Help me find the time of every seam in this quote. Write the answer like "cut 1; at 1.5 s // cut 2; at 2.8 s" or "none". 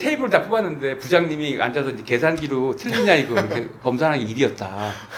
none